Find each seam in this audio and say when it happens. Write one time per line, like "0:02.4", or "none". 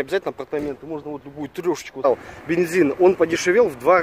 0:02.0